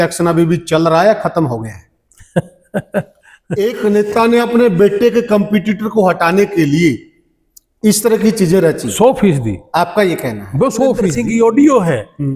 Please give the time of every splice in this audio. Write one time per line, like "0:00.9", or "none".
0:03.5
0:11.1